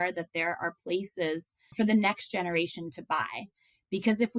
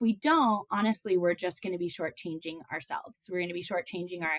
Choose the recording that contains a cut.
first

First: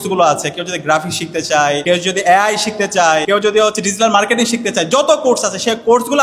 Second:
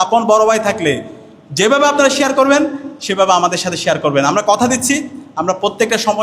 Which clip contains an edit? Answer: first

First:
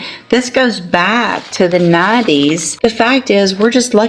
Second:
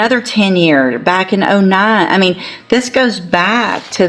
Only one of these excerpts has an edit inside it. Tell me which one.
first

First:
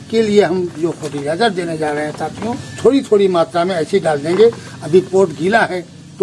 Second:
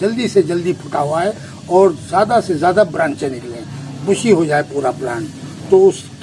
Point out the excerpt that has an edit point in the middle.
first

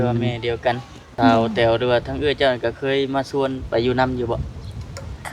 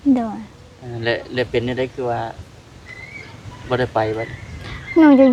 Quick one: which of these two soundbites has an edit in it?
first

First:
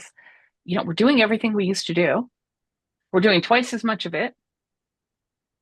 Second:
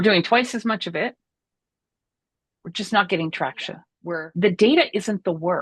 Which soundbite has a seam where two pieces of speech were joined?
second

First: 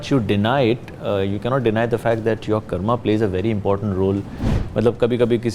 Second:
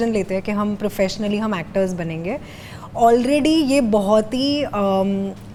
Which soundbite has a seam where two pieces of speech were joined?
first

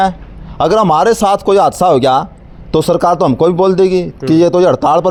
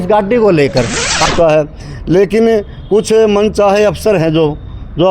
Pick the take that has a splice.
second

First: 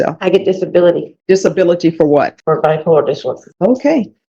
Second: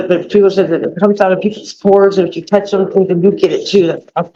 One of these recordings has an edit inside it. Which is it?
first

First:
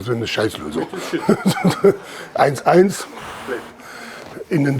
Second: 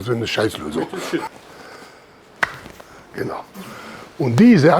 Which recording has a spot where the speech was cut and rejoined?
second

